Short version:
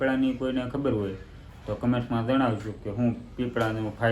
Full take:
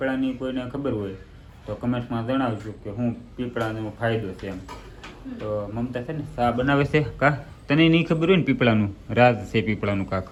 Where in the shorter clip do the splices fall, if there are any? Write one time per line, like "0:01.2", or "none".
none